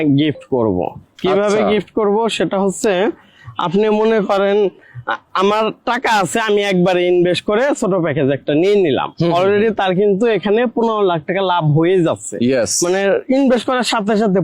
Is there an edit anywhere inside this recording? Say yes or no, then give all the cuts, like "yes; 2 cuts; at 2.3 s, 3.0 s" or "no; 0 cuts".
no; 0 cuts